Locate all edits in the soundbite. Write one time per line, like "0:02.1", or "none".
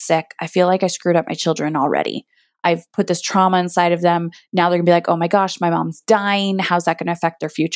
0:02.4